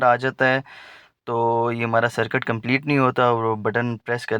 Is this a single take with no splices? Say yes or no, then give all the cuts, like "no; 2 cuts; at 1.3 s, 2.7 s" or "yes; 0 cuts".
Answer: yes; 0 cuts